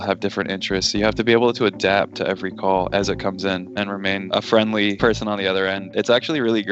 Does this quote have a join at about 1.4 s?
no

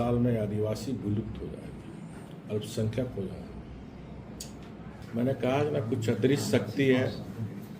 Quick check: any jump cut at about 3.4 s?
no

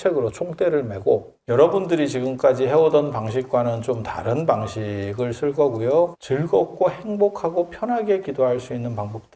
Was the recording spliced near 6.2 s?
yes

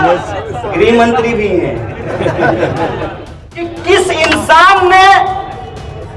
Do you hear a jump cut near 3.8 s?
yes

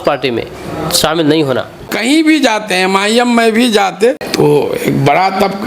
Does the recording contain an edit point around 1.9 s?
yes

